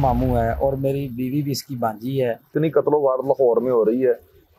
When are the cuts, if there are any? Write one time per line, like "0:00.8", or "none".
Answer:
0:02.5